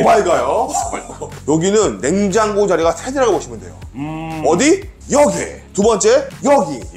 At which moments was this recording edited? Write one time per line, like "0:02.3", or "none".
0:01.4